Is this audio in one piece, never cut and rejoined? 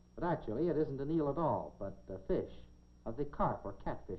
yes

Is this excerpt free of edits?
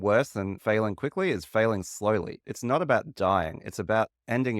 no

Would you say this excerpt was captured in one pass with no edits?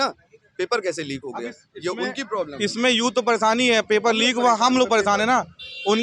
yes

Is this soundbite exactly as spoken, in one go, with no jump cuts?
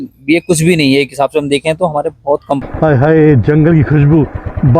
no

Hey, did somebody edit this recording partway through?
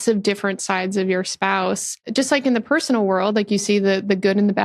yes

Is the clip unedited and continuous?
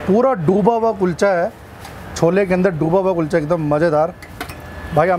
yes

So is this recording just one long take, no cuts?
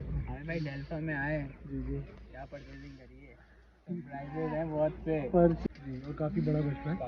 no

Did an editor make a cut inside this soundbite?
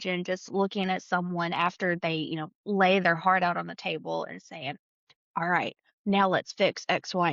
no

